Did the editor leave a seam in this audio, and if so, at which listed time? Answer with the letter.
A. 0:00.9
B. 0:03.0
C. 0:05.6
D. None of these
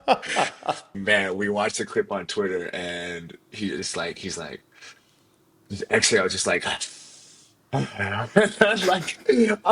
A